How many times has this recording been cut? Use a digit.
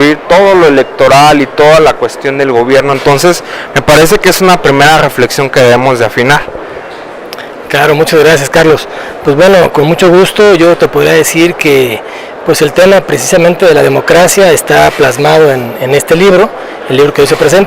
1